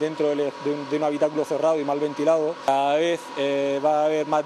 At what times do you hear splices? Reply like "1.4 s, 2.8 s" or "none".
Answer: 2.6 s